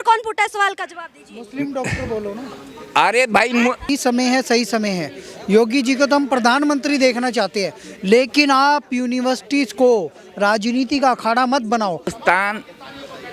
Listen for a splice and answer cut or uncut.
cut